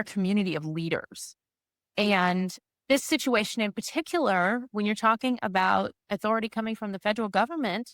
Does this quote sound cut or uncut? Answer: cut